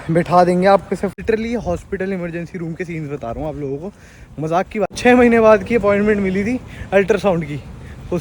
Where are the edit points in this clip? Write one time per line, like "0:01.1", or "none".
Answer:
0:01.2
0:05.0